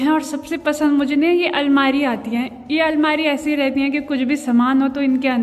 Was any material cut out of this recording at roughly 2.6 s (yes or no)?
no